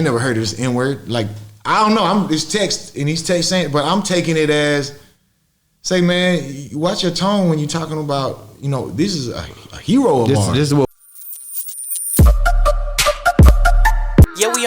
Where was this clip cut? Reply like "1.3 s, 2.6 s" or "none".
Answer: 10.9 s

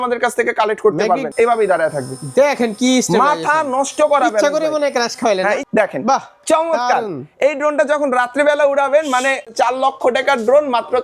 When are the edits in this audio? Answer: 1.3 s, 5.6 s, 9.5 s

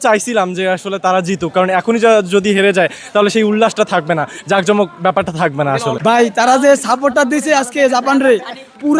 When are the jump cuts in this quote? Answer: 6.0 s

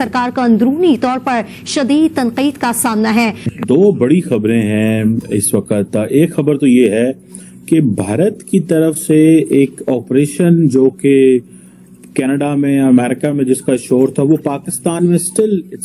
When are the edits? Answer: 3.6 s

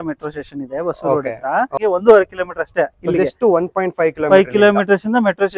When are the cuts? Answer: 1.7 s

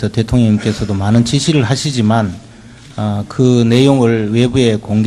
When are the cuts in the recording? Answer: 1.9 s

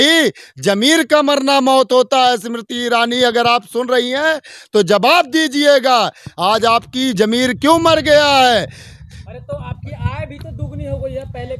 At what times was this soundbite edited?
none

